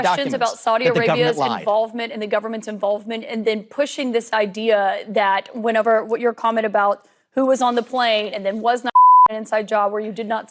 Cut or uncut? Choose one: uncut